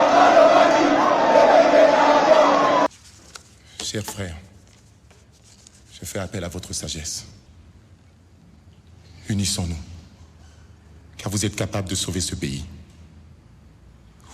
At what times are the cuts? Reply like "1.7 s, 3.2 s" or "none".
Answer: 2.4 s